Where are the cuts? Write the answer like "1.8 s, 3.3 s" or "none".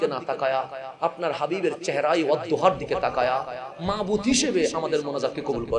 none